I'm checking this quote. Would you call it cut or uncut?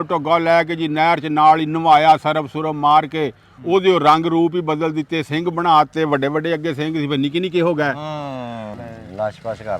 cut